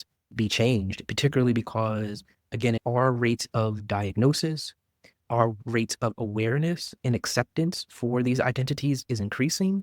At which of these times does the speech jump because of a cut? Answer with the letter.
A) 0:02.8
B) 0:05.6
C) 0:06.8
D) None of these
A